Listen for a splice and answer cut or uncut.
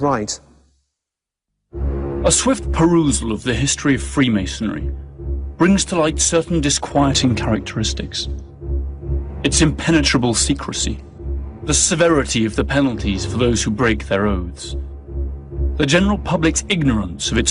cut